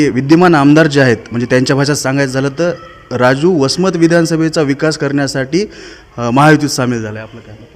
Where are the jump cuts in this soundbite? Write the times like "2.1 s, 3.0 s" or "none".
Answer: none